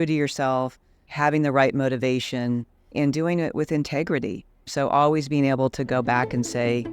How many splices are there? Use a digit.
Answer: 0